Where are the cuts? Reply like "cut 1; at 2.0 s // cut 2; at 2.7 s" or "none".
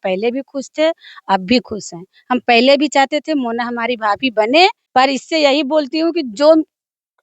cut 1; at 4.8 s